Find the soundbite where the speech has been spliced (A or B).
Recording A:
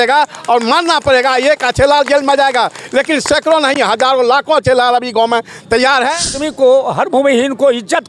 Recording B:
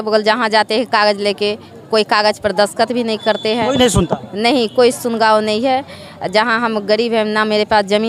A